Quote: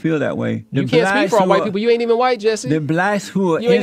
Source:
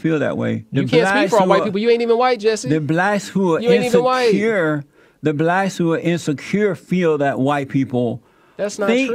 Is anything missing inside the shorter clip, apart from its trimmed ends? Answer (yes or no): no